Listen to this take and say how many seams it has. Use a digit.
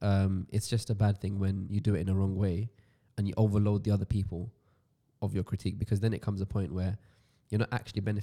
0